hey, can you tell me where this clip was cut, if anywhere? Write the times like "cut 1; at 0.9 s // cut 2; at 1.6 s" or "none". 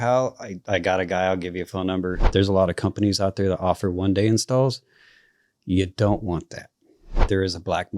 cut 1; at 2.2 s // cut 2; at 7.2 s